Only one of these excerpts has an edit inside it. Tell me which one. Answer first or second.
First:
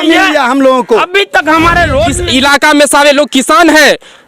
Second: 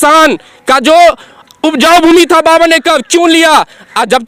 first